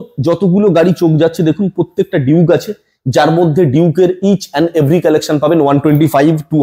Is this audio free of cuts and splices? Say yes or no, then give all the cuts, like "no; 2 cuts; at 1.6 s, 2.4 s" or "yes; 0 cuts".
yes; 0 cuts